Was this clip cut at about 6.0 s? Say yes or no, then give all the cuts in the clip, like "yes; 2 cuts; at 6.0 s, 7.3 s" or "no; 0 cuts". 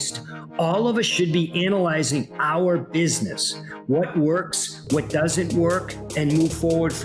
yes; 1 cut; at 6.0 s